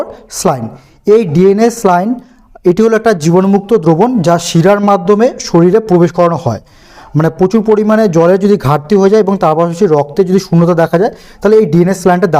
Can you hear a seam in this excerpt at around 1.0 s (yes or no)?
no